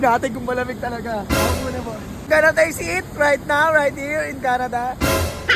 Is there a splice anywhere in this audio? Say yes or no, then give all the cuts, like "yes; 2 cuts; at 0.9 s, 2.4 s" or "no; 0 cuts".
yes; 1 cut; at 2.3 s